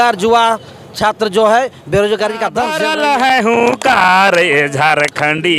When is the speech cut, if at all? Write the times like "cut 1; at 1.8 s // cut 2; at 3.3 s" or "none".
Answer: cut 1; at 2.7 s